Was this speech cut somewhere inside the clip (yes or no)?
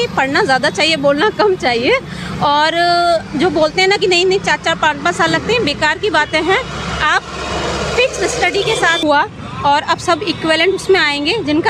yes